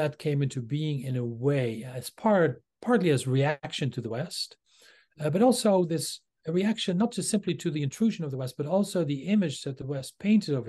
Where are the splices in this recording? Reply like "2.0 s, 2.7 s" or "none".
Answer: 3.6 s